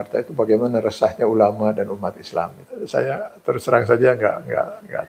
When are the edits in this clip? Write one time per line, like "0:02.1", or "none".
0:02.6